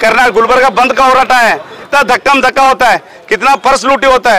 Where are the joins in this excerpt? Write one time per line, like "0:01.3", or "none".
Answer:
0:01.8